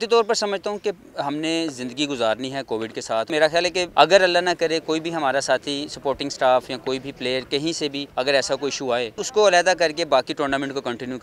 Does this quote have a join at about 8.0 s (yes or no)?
yes